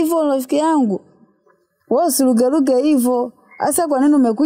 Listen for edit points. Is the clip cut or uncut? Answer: uncut